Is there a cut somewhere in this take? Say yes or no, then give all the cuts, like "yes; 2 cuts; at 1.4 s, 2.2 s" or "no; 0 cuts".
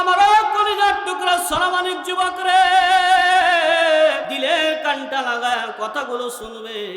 yes; 1 cut; at 4.3 s